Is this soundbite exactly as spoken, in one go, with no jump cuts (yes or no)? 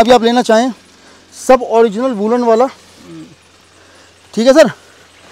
yes